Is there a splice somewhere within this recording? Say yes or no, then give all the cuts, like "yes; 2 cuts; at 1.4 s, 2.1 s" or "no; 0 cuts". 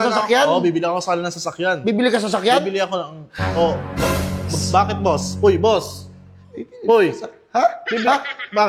no; 0 cuts